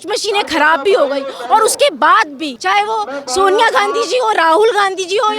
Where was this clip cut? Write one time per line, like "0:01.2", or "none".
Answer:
0:02.5